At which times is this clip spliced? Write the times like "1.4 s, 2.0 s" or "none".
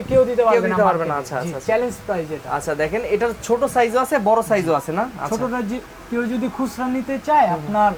none